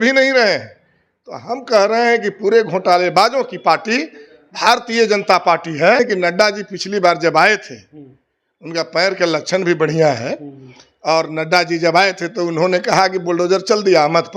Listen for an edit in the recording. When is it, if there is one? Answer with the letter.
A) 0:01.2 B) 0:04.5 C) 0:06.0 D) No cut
C